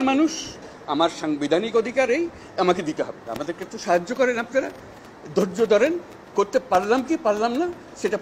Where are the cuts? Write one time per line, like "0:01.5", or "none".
0:03.3